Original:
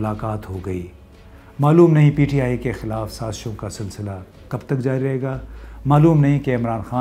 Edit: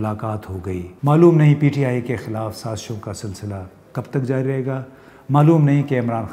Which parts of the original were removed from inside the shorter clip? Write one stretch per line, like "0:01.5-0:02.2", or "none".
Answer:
0:00.9-0:01.5